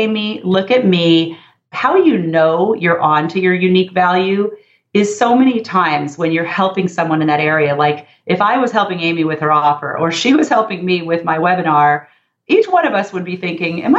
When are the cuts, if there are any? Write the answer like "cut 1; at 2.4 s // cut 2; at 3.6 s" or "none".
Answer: cut 1; at 1.7 s

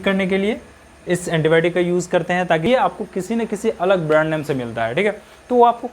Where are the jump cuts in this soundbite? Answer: cut 1; at 2.6 s

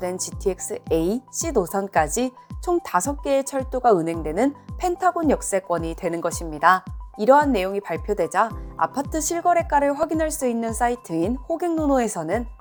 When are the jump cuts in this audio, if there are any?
none

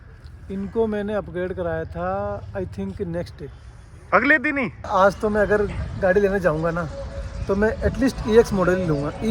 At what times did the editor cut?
cut 1; at 4.9 s

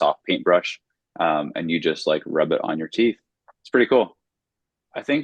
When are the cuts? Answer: none

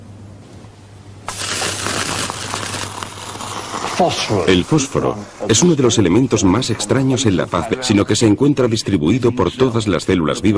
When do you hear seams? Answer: none

